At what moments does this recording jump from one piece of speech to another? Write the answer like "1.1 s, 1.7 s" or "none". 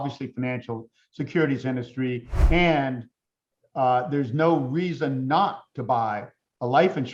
2.4 s